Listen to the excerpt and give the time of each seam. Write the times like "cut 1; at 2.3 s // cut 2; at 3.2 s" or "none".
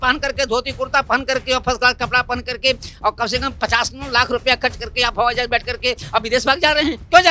none